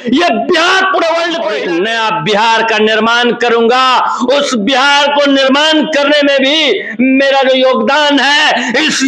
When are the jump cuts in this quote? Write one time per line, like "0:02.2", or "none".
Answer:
0:01.5